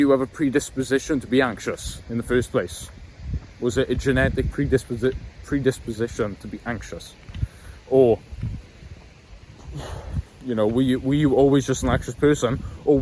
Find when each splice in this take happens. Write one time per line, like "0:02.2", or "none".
none